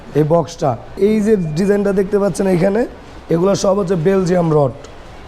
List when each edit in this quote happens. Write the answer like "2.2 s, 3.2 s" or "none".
1.0 s